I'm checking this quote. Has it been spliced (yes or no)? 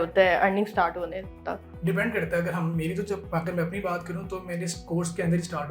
yes